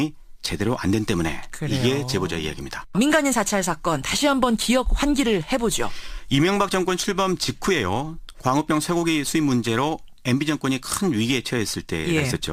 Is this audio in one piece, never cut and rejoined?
yes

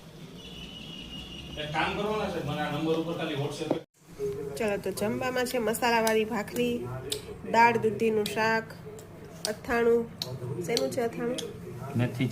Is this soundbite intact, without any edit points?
no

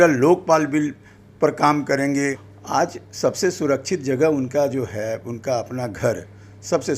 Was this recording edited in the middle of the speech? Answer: yes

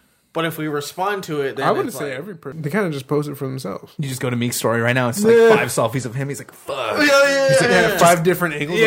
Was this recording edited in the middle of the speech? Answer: yes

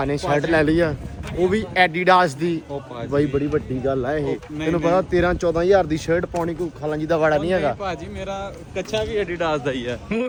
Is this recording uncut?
yes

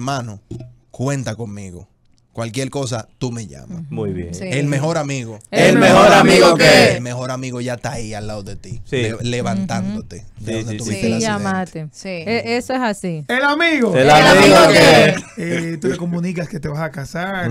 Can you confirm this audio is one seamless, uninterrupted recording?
yes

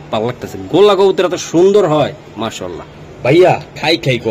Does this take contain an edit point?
no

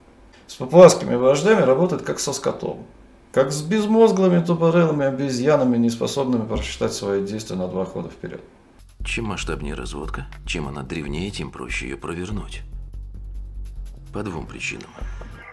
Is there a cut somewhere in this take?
no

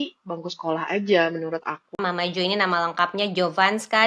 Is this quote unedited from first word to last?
no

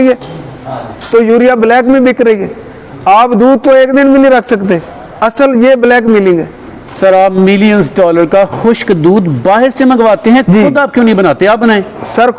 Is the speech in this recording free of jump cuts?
yes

